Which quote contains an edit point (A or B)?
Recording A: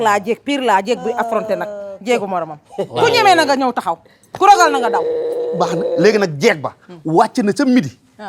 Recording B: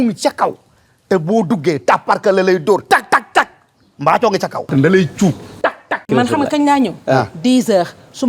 B